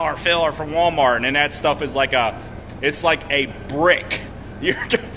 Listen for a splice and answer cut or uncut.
uncut